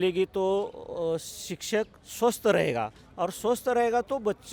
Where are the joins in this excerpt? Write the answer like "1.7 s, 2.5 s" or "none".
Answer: none